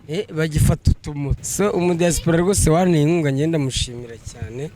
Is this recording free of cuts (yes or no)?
no